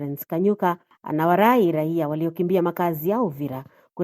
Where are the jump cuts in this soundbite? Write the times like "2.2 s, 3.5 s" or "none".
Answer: 0.9 s